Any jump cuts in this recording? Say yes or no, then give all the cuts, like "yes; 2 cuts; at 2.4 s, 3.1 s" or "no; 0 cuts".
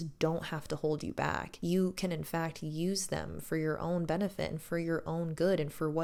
no; 0 cuts